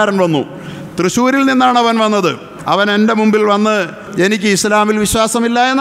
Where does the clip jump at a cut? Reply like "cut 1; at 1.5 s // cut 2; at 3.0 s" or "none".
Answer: cut 1; at 2.5 s // cut 2; at 4.0 s